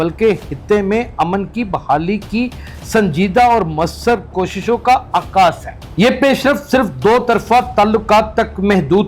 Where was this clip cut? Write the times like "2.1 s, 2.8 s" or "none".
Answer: 5.8 s

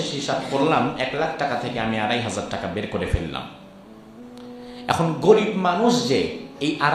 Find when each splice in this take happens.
none

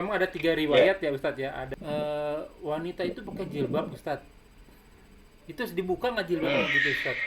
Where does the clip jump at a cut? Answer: 1.7 s

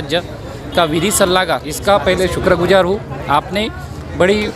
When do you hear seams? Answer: 1.7 s

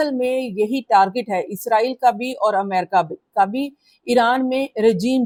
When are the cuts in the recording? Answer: none

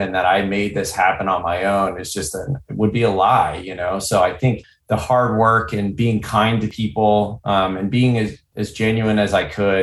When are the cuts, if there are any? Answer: none

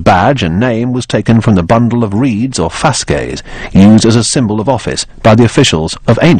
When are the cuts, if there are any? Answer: none

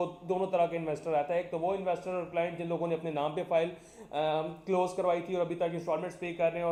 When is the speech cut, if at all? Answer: none

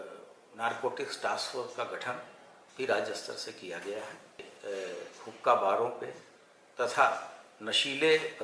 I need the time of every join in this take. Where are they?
4.5 s

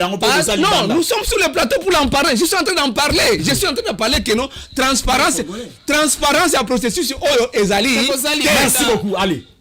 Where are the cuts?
none

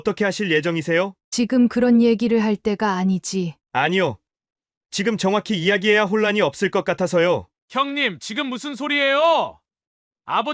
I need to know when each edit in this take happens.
1.2 s, 7.5 s

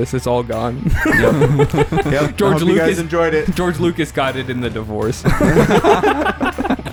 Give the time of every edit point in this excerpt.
none

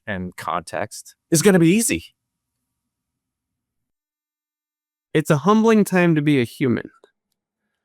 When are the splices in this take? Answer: 1.1 s

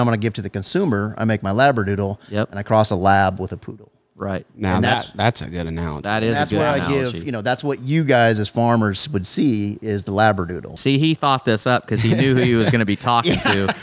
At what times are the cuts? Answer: 10.6 s

